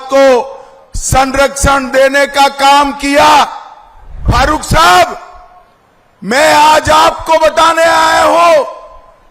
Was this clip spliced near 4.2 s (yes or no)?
yes